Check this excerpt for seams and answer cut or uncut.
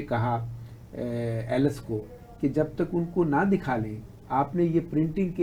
uncut